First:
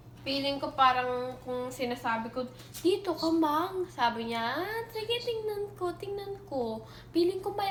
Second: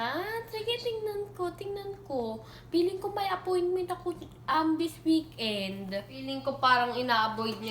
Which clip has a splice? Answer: second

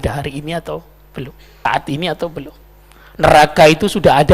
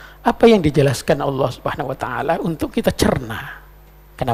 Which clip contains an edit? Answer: first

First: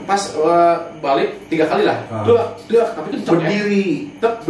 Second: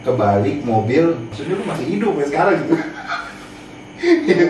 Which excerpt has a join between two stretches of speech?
second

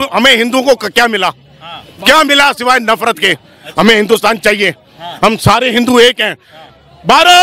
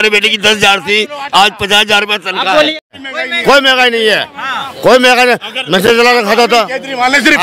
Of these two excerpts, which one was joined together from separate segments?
second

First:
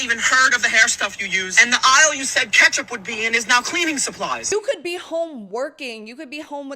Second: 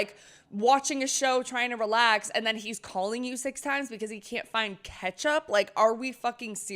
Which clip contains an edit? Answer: first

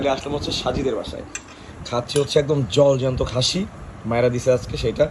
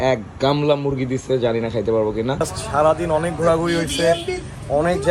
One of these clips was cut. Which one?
second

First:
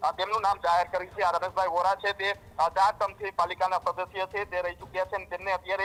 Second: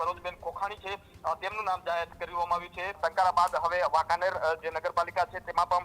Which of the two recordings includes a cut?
second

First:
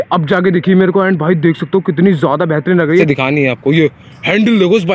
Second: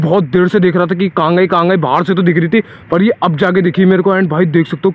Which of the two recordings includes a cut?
first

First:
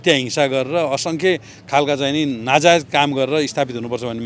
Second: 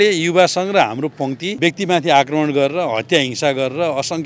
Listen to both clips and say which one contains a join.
second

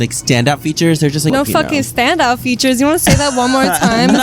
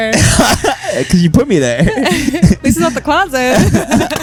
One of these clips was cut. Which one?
first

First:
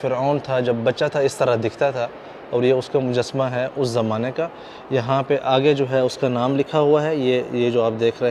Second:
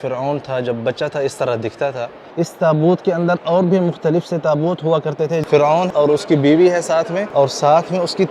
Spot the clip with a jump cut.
second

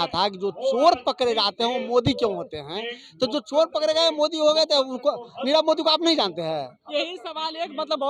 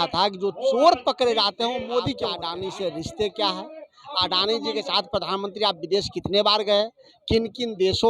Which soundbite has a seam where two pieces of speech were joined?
second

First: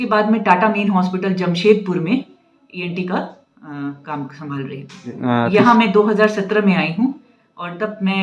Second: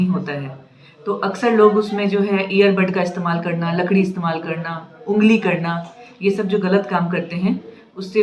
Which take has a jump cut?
first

